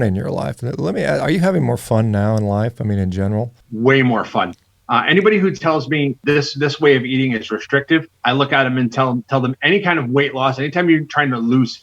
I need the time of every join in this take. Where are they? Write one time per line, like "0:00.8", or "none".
0:03.6
0:06.2
0:08.1